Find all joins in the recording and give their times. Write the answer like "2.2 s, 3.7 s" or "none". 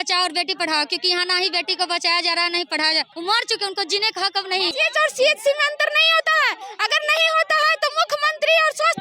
3.1 s, 4.7 s